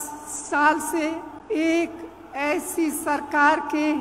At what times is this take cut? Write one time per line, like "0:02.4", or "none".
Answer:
0:01.3